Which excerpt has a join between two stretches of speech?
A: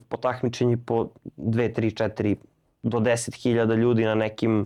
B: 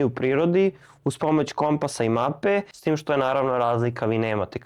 B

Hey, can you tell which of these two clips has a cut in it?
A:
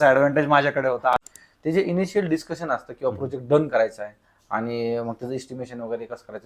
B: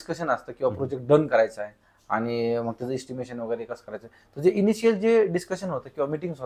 A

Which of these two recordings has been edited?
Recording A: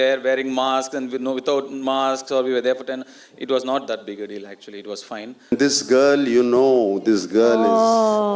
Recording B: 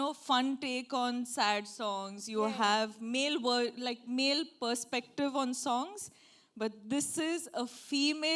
A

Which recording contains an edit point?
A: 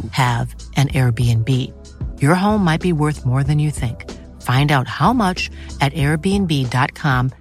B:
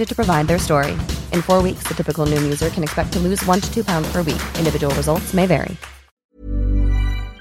B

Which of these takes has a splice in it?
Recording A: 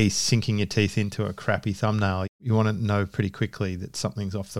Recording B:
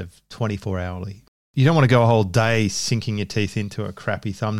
B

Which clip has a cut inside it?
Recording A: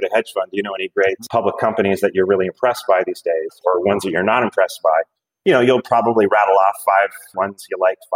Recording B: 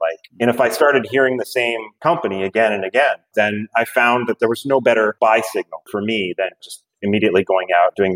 A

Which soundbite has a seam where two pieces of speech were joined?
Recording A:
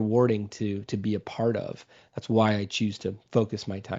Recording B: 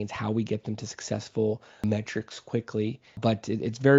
B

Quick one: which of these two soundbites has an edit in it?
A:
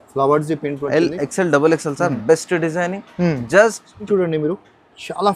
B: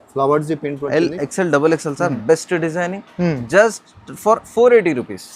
A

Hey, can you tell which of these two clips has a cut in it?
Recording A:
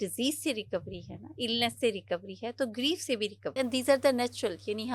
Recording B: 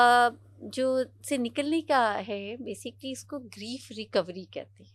A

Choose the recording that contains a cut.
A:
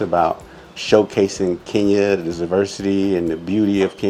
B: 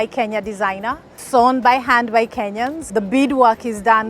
B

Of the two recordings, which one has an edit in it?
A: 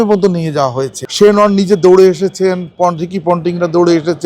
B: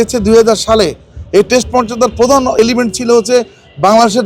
A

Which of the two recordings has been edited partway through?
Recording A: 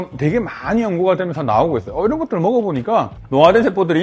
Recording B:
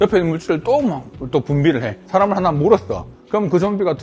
B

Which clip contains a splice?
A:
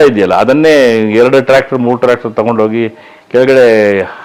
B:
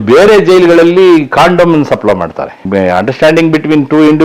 B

